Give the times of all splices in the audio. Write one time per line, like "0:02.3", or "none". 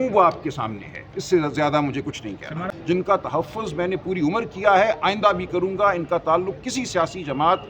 0:02.7